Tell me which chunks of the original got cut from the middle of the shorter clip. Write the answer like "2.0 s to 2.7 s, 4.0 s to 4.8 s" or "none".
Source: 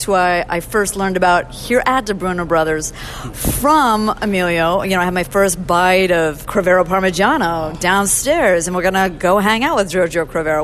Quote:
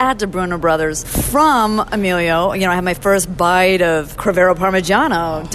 2.9 s to 3.4 s